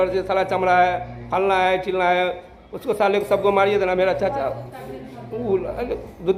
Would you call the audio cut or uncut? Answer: uncut